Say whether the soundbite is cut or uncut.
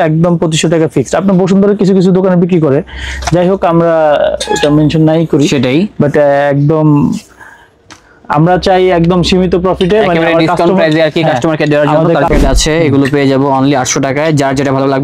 cut